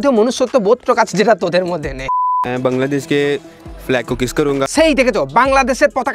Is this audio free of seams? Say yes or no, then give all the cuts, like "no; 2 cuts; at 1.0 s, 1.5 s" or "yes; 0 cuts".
no; 1 cut; at 2.4 s